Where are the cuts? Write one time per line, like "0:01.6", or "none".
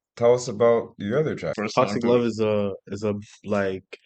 0:01.5